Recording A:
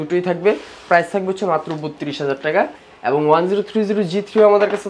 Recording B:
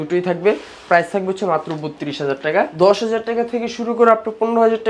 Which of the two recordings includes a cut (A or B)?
B